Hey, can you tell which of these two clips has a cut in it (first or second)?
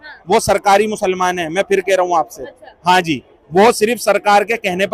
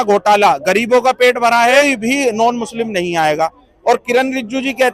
second